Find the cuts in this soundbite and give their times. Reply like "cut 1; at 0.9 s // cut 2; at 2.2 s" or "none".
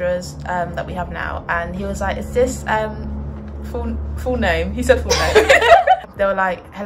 none